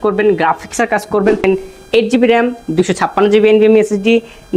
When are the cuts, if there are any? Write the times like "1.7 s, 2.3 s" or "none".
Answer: 1.4 s